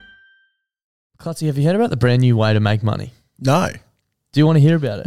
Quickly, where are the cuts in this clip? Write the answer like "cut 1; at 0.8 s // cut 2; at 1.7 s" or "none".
cut 1; at 0.9 s